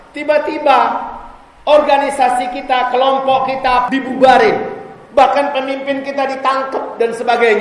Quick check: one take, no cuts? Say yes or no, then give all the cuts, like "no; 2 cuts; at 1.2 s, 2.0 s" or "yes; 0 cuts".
no; 1 cut; at 3.9 s